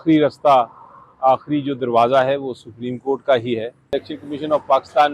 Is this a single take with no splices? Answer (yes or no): no